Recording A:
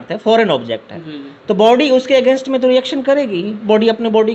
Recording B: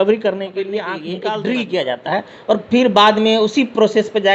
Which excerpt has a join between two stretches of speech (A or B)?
B